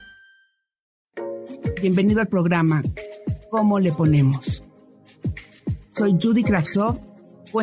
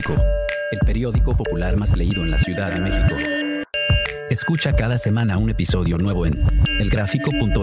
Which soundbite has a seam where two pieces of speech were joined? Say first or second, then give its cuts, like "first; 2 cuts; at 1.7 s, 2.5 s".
first; 1 cut; at 1.0 s